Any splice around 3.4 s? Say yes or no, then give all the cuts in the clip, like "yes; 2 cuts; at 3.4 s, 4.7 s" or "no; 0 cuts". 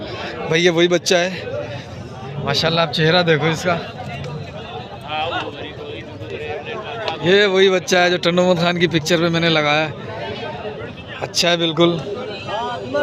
no; 0 cuts